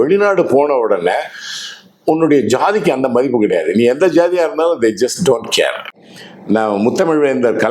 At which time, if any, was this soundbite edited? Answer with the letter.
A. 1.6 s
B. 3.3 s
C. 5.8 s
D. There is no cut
C